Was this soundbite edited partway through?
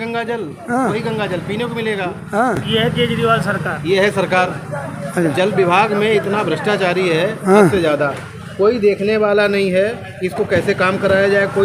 no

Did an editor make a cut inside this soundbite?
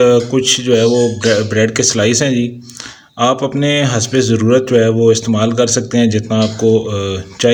no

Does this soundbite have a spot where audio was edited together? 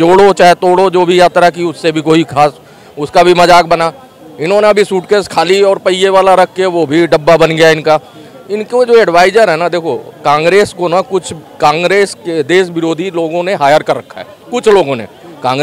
no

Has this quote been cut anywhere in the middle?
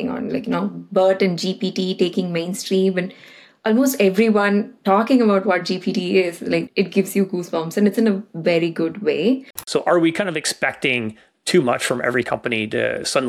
yes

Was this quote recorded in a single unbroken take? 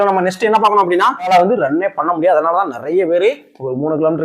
no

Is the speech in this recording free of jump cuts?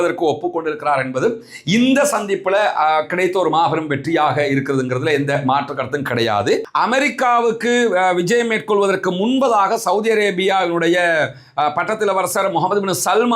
no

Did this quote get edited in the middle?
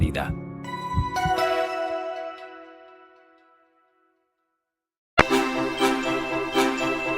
yes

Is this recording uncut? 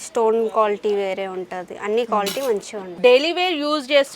no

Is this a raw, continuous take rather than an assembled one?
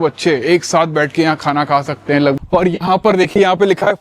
no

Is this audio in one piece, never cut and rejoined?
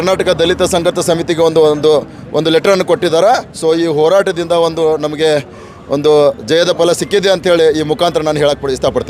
yes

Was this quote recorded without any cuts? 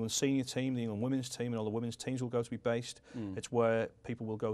no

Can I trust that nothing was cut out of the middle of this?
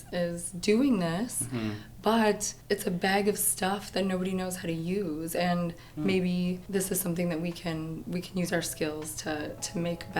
no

